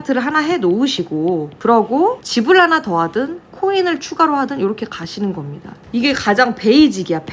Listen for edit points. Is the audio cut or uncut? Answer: cut